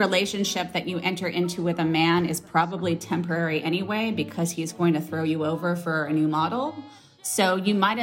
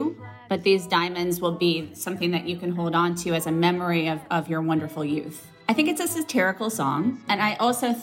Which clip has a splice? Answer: second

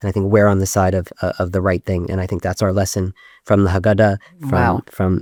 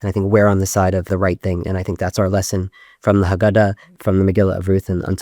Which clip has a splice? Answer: second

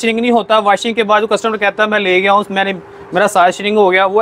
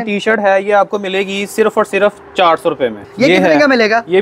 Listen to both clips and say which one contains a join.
second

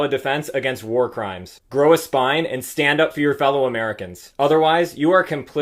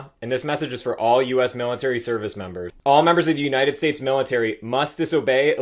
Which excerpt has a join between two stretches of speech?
second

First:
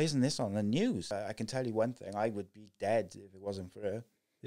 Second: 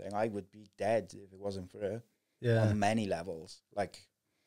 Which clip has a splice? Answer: first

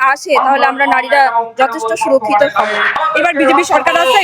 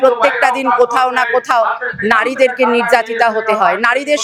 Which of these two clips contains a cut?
first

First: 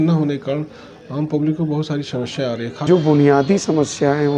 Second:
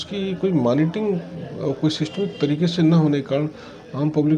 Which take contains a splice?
first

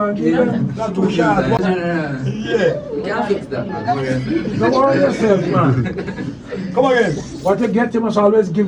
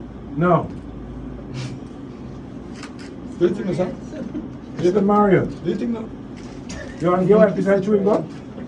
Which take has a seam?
first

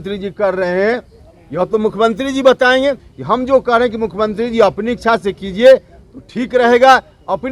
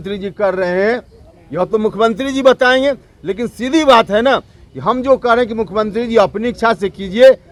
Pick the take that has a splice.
first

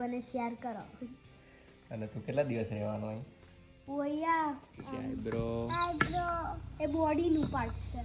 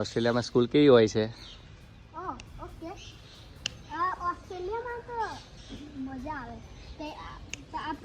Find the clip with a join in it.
first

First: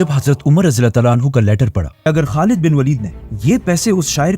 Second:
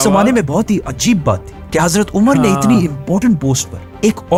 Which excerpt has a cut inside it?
first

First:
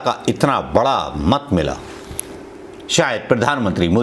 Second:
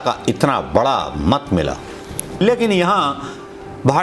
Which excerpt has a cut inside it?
second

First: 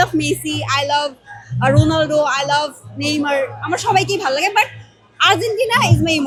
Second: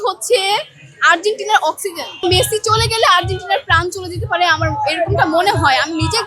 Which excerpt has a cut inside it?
second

